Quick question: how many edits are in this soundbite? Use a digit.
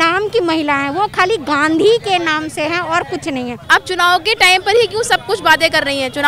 1